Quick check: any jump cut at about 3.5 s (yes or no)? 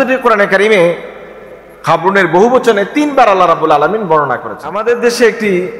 no